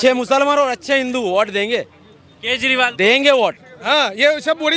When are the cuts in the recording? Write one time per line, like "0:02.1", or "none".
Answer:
0:03.7